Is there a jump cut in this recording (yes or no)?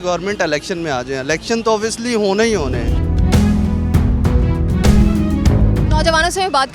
no